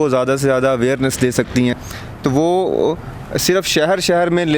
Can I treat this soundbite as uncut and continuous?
no; 1 cut; at 1.8 s

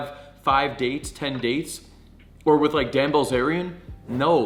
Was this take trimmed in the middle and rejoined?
no; 0 cuts

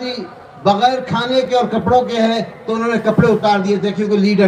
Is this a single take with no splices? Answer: yes; 0 cuts

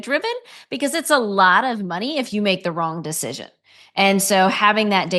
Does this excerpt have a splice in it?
no; 0 cuts

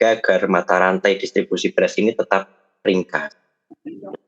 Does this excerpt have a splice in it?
yes; 1 cut; at 3.3 s

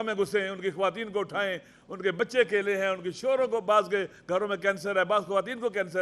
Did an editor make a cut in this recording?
no; 0 cuts

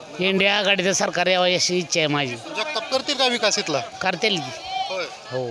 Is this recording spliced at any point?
no; 0 cuts

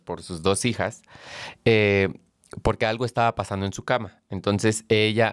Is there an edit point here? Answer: no; 0 cuts

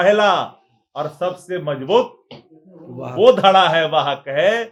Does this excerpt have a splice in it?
no; 0 cuts

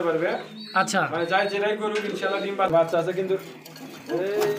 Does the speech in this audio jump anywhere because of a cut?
yes; 1 cut; at 2.7 s

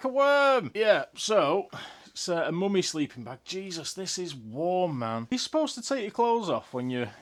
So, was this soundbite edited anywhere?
no; 0 cuts

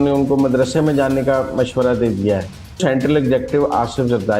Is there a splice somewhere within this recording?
yes; 1 cut; at 2.8 s

